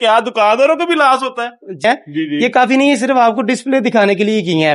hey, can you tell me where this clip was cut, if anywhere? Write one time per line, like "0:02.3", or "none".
0:01.8